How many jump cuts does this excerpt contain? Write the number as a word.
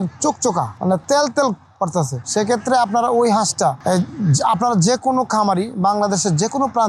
zero